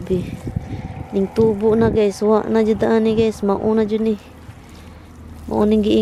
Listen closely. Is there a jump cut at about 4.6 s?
no; 0 cuts

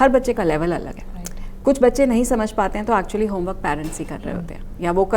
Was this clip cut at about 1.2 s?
no; 0 cuts

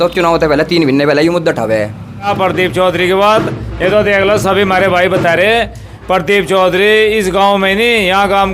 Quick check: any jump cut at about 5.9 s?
no; 1 cut; at 2.3 s

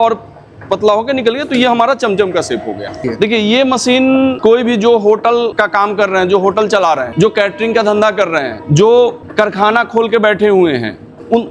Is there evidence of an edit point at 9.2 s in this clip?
yes; 6 cuts; at 3.1 s, 4.4 s, 5.6 s, 7.1 s, 8.6 s, 9.2 s

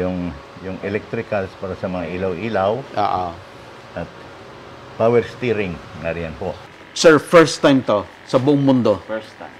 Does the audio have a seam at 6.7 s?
yes; 1 cut; at 6.7 s

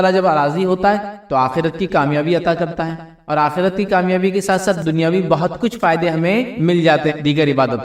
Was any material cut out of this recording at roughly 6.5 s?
yes; 3 cuts; at 4.8 s, 6.5 s, 7.1 s

